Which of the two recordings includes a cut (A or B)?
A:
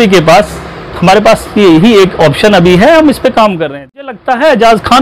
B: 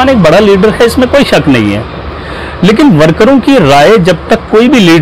A